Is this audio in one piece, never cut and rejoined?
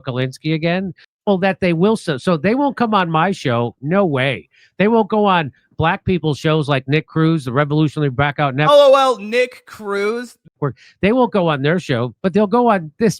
no; 2 cuts; at 1.1 s, 10.4 s

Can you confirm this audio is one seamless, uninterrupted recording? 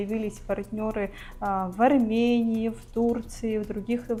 yes; 0 cuts

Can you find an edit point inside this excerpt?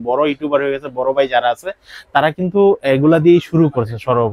no; 0 cuts

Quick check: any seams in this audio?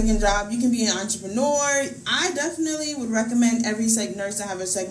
no; 0 cuts

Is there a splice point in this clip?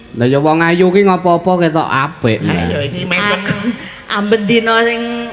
no; 0 cuts

